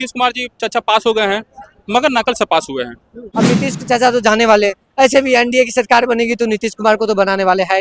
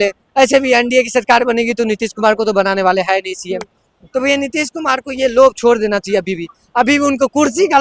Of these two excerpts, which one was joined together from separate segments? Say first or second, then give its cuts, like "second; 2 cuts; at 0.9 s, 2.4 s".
first; 1 cut; at 3.2 s